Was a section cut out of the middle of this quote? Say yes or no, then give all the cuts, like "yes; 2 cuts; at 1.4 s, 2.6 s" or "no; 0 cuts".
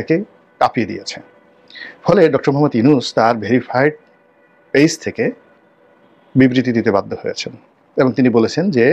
no; 0 cuts